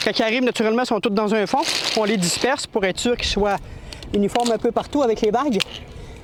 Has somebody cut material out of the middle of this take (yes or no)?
no